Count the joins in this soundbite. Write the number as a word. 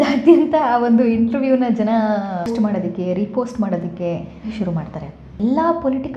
two